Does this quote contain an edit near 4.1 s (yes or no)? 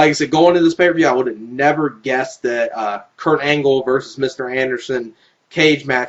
no